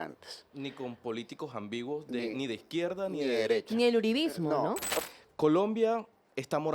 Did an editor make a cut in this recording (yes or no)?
yes